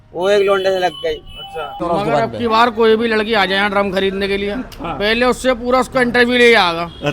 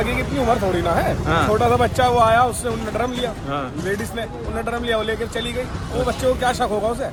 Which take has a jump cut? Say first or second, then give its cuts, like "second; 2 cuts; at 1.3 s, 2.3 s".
first; 1 cut; at 1.8 s